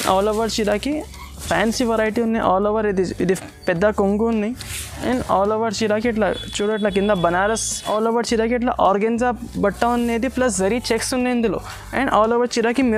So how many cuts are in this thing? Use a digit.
2